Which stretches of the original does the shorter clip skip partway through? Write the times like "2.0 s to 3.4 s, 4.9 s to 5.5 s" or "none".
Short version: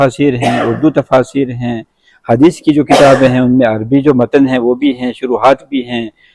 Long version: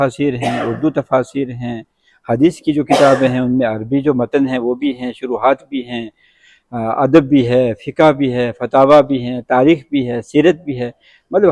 none